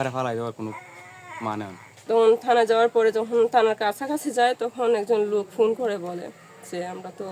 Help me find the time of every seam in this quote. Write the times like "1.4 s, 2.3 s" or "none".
1.9 s